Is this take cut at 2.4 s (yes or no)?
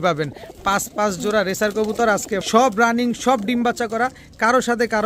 yes